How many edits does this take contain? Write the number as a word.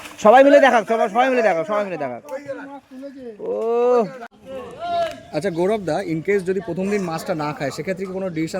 one